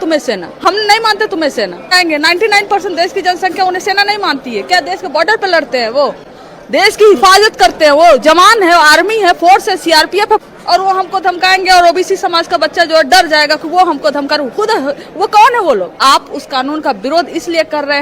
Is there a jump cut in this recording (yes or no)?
yes